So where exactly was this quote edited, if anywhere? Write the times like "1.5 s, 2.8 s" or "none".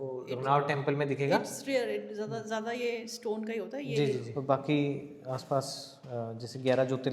4.3 s